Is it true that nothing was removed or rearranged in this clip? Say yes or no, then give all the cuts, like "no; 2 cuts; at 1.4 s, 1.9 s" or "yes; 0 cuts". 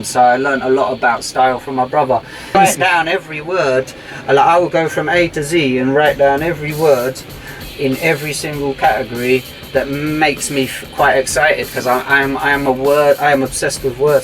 no; 1 cut; at 2.5 s